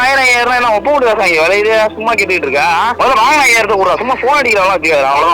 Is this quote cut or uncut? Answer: cut